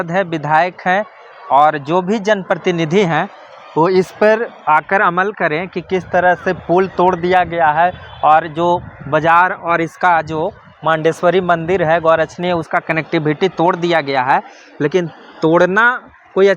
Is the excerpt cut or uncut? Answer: uncut